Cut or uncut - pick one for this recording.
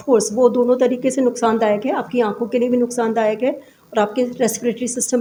uncut